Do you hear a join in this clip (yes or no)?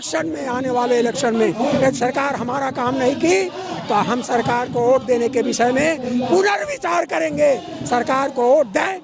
no